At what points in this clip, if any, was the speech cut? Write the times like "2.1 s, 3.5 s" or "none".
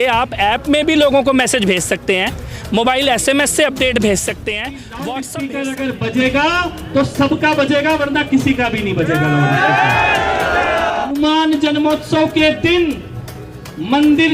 4.9 s, 11.1 s